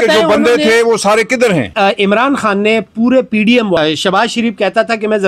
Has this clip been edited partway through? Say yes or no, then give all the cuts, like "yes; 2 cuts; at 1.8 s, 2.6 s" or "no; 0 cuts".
yes; 2 cuts; at 1.7 s, 3.8 s